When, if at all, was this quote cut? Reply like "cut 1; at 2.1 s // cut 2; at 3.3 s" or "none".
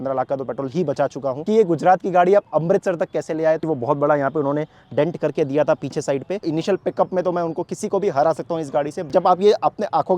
cut 1; at 1.4 s // cut 2; at 3.6 s // cut 3; at 6.4 s // cut 4; at 9.1 s

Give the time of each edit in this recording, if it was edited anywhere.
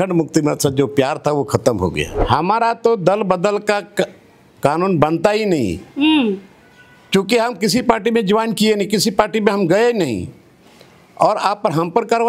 cut 1; at 2.1 s

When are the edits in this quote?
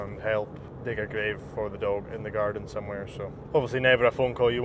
none

